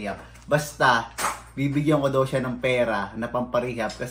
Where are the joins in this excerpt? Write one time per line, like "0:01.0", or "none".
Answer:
none